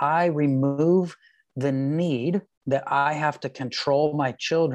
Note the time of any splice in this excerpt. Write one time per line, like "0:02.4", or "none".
0:02.5